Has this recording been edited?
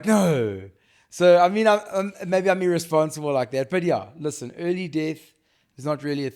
no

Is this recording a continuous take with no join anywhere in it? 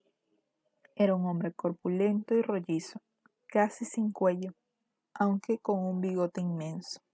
yes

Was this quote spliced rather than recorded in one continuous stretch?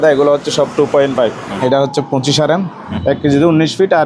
yes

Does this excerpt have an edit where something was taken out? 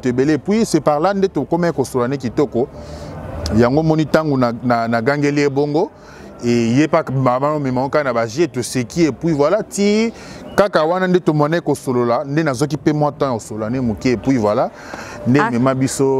no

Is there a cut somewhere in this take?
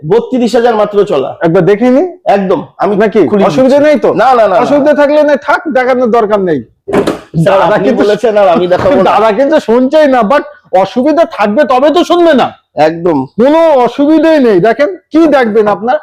no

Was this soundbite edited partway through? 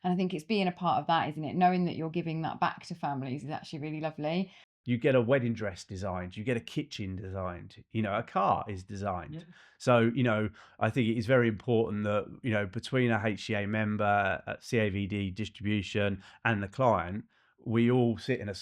yes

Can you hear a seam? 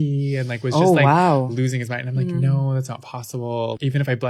no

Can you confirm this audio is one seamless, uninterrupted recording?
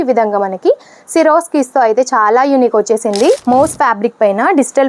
no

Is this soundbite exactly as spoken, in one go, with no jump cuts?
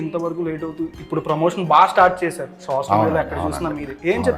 yes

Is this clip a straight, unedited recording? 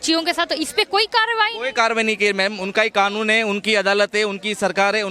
yes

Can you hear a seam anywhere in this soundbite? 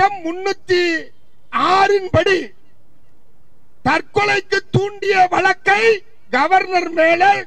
no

